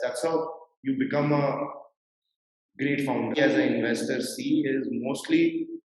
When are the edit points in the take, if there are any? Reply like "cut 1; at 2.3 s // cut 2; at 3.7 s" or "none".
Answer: cut 1; at 3.4 s